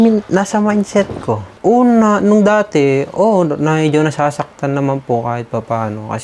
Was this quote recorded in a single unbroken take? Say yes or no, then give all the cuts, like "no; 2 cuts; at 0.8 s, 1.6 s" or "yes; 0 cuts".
no; 1 cut; at 1.4 s